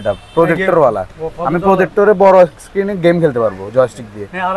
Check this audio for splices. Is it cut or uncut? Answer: uncut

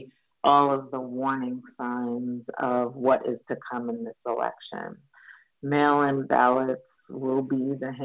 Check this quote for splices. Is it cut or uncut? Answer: uncut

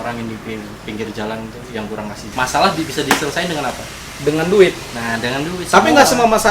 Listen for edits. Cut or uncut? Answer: cut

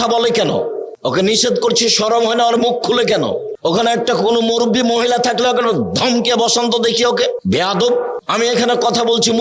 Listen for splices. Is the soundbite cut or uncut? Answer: cut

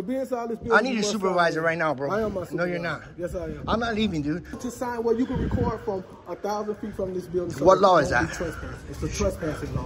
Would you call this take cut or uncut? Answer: cut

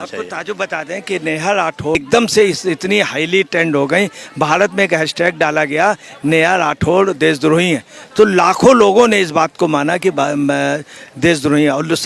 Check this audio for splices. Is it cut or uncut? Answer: cut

